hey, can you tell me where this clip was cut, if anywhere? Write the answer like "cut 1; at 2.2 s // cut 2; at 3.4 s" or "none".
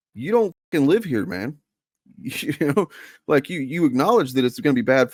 none